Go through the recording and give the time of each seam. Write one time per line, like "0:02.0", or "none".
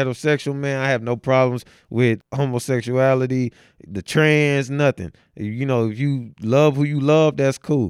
0:02.2